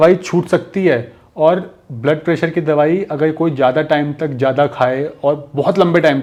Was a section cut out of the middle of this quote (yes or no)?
no